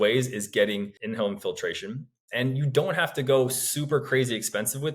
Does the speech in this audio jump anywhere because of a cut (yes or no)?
yes